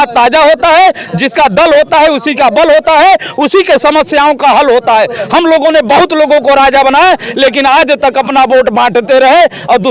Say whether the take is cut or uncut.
uncut